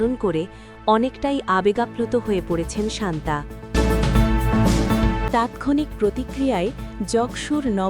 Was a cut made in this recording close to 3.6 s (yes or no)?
yes